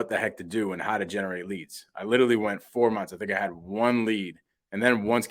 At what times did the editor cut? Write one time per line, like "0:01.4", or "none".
none